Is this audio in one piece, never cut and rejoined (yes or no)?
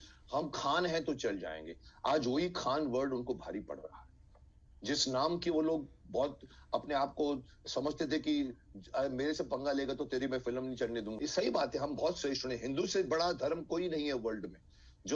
no